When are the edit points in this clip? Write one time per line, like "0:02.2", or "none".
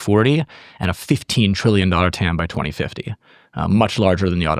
none